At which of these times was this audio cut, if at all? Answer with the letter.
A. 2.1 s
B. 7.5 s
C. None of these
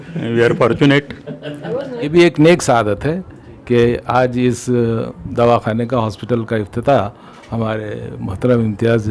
A